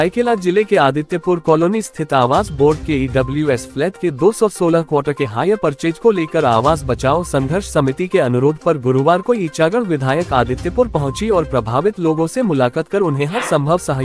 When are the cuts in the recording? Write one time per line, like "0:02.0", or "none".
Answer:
none